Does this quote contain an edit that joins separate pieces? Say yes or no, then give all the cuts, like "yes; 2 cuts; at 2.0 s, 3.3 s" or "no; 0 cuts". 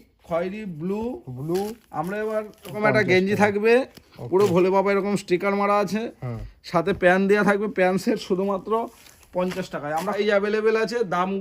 yes; 2 cuts; at 2.7 s, 10.1 s